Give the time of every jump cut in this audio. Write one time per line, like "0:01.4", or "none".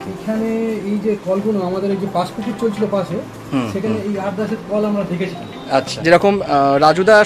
0:05.9

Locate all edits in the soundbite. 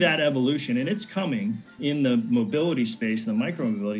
none

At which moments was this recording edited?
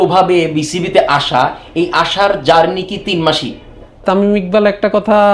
0:04.0

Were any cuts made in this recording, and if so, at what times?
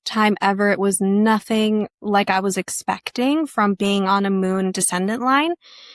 none

